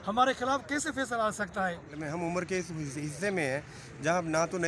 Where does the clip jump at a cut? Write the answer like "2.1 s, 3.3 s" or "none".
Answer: 2.0 s